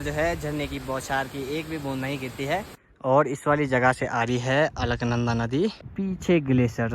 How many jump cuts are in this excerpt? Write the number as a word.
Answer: two